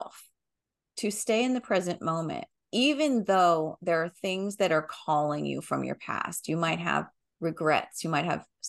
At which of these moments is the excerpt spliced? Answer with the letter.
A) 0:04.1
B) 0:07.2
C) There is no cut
B